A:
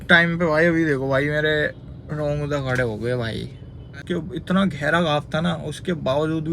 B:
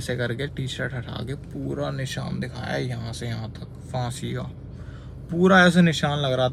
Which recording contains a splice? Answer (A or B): A